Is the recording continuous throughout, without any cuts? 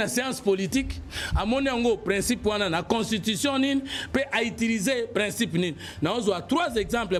yes; 0 cuts

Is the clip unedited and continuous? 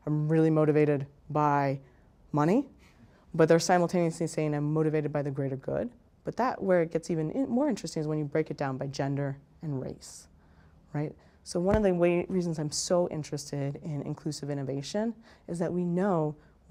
yes; 0 cuts

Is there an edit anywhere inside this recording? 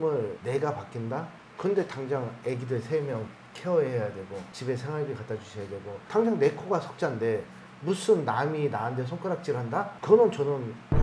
no; 0 cuts

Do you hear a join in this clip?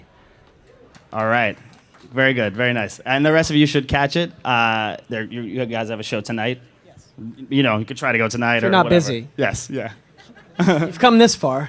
yes; 1 cut; at 6.0 s

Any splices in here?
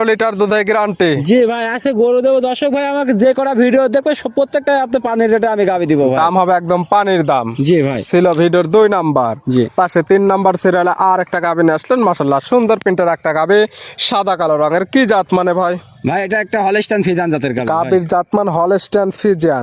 no; 0 cuts

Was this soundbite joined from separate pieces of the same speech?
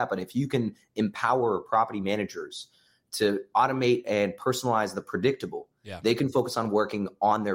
no; 0 cuts

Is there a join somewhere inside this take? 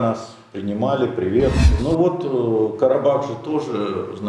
yes; 1 cut; at 1.7 s

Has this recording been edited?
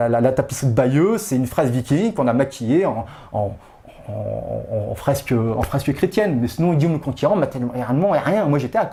no; 0 cuts

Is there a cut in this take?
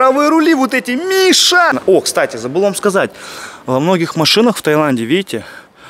yes; 1 cut; at 1.7 s

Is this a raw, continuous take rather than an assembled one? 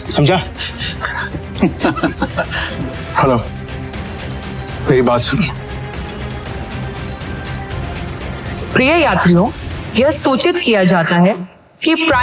no; 2 cuts; at 2.6 s, 6.4 s

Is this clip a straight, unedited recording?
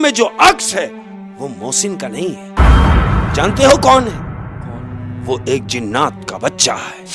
yes; 0 cuts

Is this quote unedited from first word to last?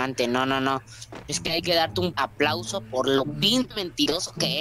no; 2 cuts; at 2.2 s, 3.4 s

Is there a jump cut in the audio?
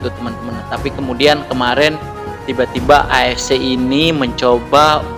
no; 0 cuts

